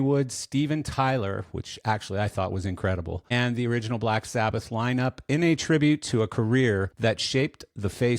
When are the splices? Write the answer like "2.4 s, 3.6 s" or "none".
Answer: 3.3 s, 6.9 s